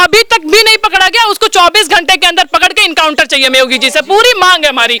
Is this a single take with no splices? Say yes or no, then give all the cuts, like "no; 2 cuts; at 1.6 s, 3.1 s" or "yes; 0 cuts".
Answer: yes; 0 cuts